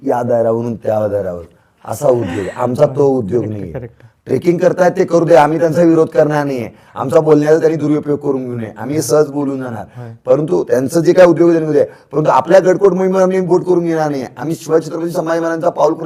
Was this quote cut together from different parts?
no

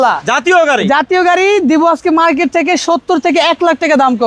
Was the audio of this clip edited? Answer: no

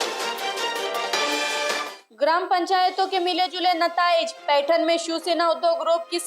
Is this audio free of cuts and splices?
no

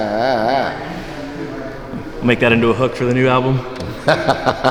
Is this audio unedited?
yes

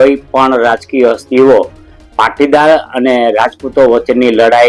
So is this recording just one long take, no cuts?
yes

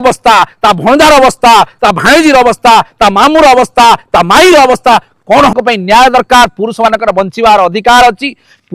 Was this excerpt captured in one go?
no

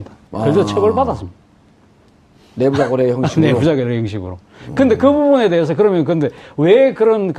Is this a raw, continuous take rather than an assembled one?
yes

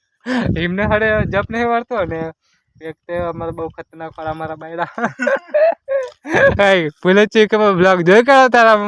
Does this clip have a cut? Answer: no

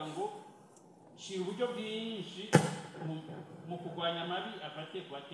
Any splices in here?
no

